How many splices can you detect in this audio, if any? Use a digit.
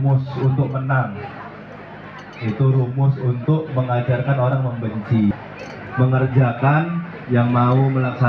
1